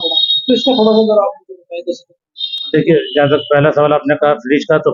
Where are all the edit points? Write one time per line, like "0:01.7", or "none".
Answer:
none